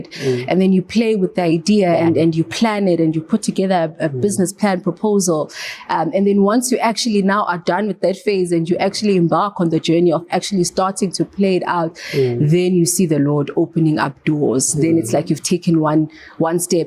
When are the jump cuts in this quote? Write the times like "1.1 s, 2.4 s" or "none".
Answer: 2.0 s